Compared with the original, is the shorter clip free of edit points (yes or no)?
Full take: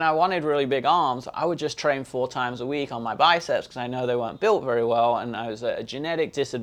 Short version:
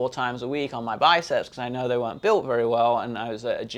yes